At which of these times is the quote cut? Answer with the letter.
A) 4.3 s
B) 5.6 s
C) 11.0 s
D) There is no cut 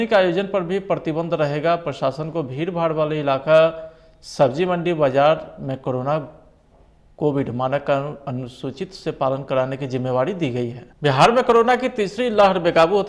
C